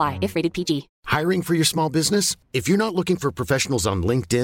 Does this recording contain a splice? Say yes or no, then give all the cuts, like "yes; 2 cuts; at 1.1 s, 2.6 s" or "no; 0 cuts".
yes; 1 cut; at 0.9 s